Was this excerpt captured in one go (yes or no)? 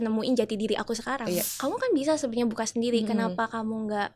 no